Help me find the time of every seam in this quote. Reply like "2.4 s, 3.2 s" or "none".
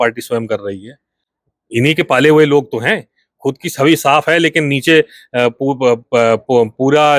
none